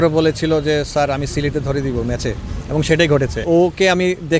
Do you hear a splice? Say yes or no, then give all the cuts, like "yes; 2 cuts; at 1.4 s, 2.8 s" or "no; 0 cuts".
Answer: yes; 1 cut; at 3.4 s